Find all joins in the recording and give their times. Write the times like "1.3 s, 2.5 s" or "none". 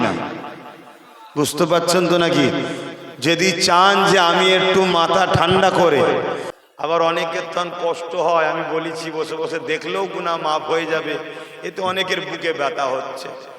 6.5 s